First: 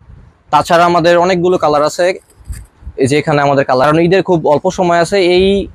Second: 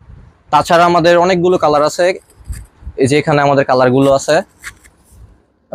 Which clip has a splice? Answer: first; 1 cut; at 3.8 s

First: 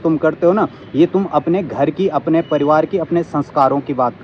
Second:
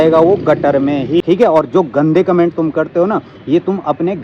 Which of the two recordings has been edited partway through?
second; 1 cut; at 1.2 s

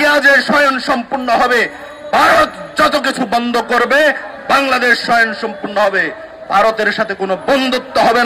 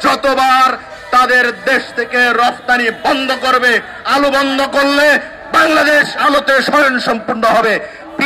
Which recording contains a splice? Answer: second; 1 cut; at 6.1 s

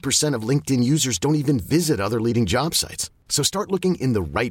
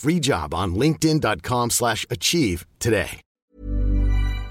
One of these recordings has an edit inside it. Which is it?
second; 1 cut; at 3.3 s

